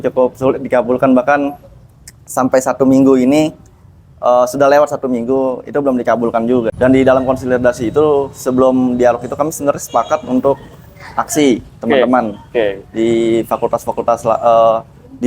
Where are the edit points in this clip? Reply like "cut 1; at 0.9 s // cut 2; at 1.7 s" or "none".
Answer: cut 1; at 6.7 s